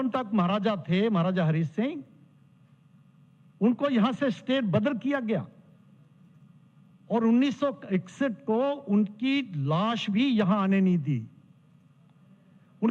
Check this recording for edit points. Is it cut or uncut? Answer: uncut